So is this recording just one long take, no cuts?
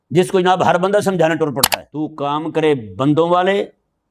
no; 1 cut; at 1.6 s

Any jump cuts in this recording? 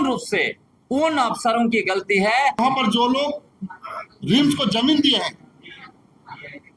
yes; 1 cut; at 2.6 s

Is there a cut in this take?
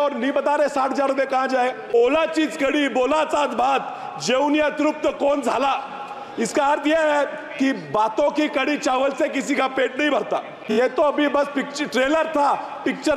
yes; 2 cuts; at 2.0 s, 10.6 s

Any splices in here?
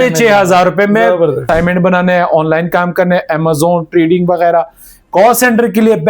yes; 1 cut; at 1.4 s

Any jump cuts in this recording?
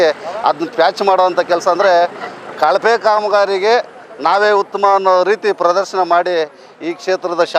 no; 0 cuts

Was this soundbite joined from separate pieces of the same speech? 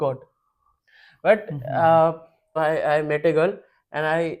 yes; 1 cut; at 2.6 s

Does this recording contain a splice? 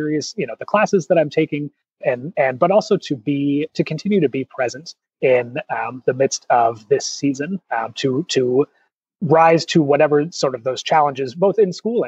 no; 0 cuts

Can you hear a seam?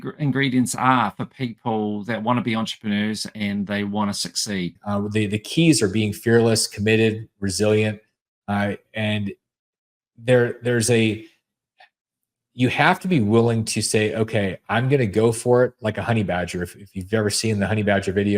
yes; 1 cut; at 4.8 s

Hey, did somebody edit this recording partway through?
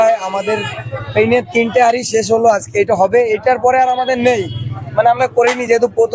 no; 0 cuts

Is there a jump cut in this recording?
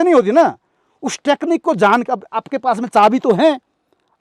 no; 0 cuts

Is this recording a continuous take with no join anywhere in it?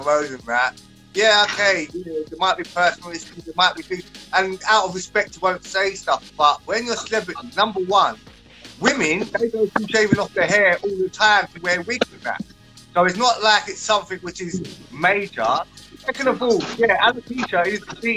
yes; 0 cuts

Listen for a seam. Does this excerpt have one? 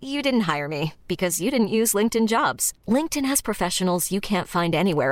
no; 0 cuts

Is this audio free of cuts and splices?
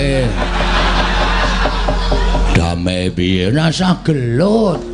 yes; 0 cuts

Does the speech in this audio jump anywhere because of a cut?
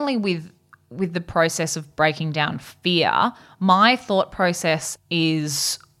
yes; 1 cut; at 4.9 s

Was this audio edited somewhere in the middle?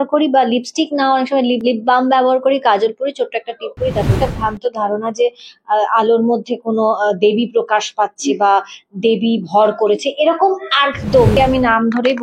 yes; 3 cuts; at 1.6 s, 4.2 s, 11.3 s

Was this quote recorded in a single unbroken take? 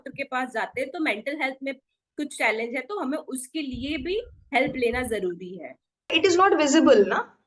no; 1 cut; at 6.1 s

